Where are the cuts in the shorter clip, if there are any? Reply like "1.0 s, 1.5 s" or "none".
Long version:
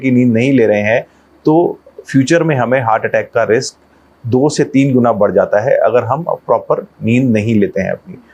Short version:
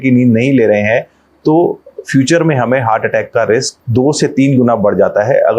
3.8 s